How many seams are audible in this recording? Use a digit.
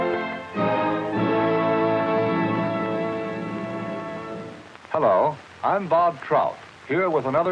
1